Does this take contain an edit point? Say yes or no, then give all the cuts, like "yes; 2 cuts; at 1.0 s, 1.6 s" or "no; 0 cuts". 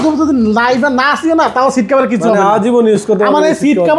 no; 0 cuts